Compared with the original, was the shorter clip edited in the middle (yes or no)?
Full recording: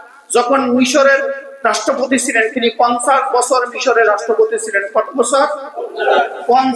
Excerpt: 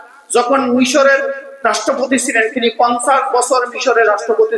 no